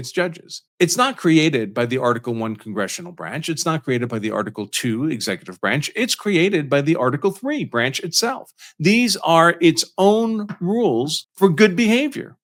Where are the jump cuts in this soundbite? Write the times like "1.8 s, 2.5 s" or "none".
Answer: none